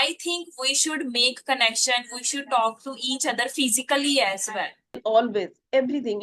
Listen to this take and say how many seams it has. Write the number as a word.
one